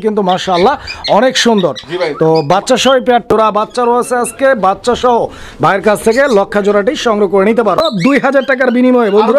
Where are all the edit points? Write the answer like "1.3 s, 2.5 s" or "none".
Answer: 3.3 s, 7.8 s